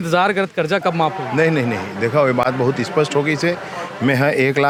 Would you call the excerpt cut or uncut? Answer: uncut